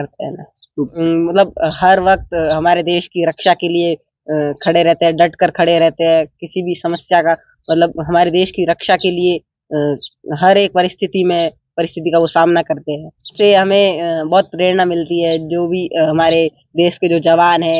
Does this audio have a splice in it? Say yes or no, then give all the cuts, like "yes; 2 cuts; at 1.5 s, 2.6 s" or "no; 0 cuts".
yes; 2 cuts; at 1.0 s, 13.3 s